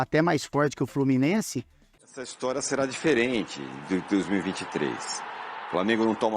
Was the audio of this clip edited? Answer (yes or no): yes